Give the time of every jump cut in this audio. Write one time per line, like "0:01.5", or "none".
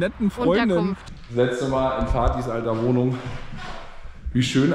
0:01.1